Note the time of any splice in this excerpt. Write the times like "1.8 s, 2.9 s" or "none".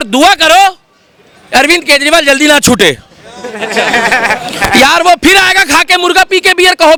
none